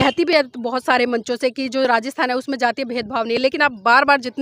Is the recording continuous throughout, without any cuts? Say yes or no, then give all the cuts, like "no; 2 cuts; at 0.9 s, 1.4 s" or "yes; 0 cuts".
yes; 0 cuts